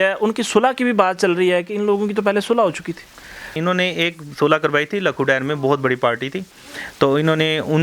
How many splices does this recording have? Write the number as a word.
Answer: one